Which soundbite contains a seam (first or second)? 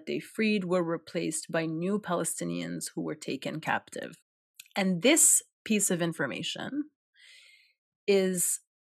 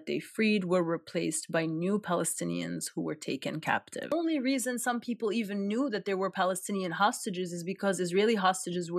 second